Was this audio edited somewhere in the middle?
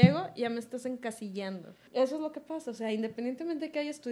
yes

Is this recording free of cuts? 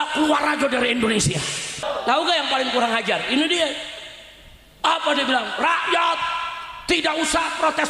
no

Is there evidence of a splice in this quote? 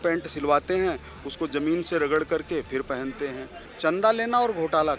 yes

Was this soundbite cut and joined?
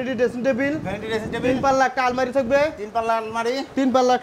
no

